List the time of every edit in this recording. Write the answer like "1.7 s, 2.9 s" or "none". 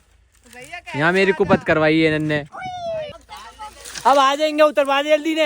3.1 s